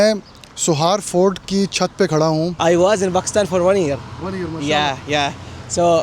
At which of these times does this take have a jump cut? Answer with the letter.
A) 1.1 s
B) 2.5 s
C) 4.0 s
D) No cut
B